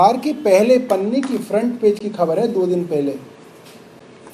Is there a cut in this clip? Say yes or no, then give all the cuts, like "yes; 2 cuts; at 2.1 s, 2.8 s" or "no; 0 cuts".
no; 0 cuts